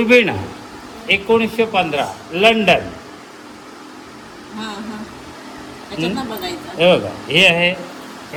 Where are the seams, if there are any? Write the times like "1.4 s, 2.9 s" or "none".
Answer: none

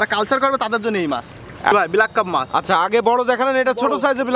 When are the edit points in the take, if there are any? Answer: 1.7 s

